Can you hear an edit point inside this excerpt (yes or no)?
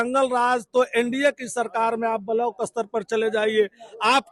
no